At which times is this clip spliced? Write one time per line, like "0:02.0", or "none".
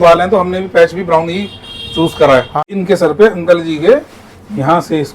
0:02.6